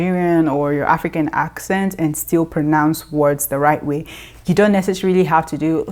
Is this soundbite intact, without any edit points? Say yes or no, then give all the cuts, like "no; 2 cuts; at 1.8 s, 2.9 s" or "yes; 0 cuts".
yes; 0 cuts